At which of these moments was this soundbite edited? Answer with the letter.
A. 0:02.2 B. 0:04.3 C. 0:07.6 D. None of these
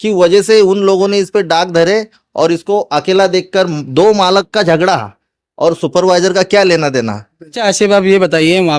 C